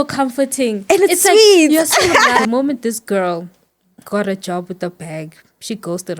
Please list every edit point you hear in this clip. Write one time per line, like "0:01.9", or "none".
0:02.4

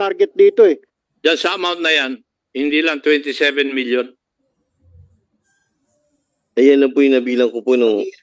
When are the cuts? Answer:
0:00.9

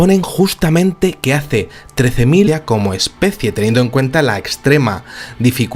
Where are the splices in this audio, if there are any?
none

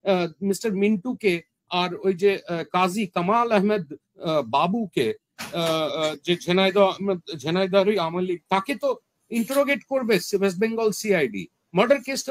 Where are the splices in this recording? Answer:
none

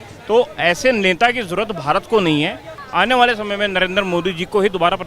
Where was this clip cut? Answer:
0:02.8

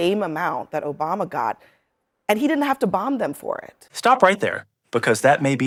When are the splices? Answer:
none

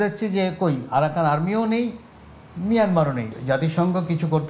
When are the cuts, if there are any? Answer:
0:03.3

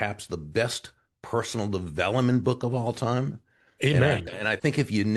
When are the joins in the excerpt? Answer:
0:04.2

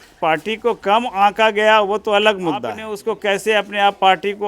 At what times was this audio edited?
0:03.0

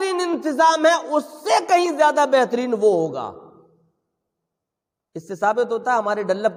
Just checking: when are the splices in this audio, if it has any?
none

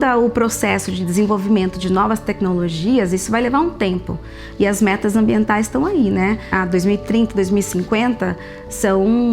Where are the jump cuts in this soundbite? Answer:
0:06.5

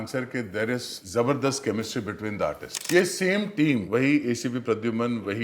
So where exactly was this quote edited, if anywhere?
0:01.0
0:02.7
0:03.8

